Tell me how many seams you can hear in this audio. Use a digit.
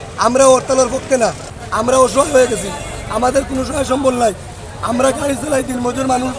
1